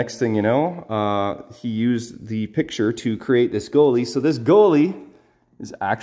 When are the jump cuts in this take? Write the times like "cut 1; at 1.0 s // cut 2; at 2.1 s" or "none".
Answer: none